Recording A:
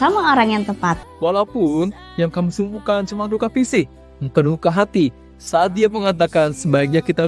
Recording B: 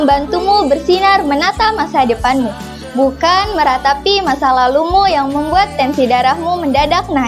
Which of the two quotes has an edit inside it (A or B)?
A